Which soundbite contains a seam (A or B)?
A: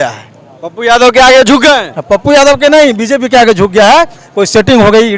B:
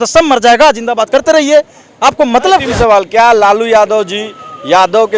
B